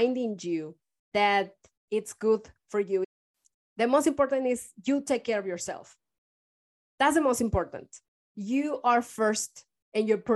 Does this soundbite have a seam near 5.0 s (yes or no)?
no